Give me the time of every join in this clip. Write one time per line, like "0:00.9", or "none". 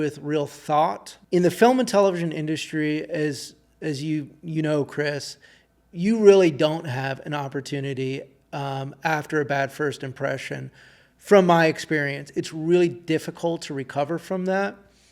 0:01.1